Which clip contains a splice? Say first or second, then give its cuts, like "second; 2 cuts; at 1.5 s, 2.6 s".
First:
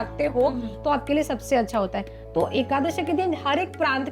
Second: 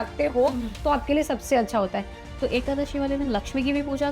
second; 1 cut; at 2.3 s